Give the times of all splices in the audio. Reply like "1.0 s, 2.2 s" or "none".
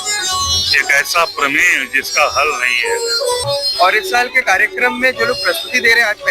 3.4 s